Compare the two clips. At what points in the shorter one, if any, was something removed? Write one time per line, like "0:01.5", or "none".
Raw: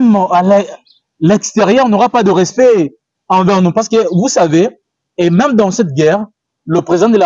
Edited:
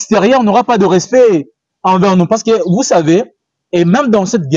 none